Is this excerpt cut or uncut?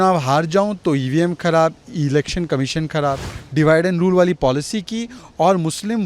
cut